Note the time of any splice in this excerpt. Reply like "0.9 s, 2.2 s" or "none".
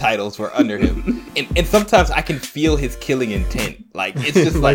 1.2 s